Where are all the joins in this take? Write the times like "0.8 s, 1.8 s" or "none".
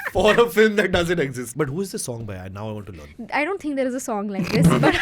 1.4 s